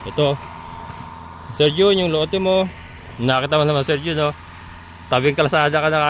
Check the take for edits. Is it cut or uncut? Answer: uncut